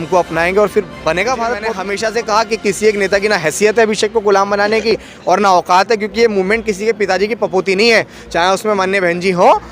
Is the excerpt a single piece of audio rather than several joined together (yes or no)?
no